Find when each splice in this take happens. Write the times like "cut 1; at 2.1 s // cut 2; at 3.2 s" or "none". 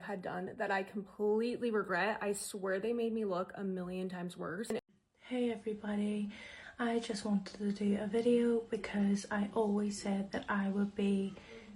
cut 1; at 4.8 s

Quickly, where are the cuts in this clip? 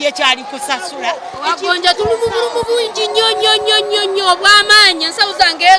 cut 1; at 0.9 s

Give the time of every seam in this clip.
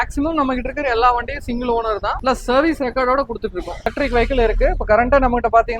cut 1; at 3.9 s

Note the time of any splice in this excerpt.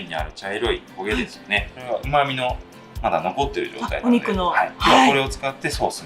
cut 1; at 1.7 s

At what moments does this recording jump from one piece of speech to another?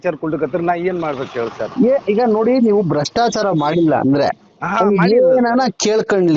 none

